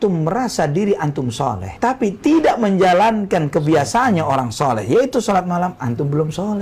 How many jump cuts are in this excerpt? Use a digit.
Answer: 0